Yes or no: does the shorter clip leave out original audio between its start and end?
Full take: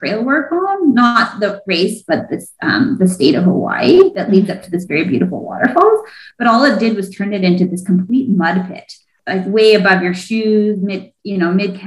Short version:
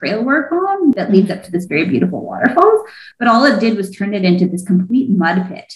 yes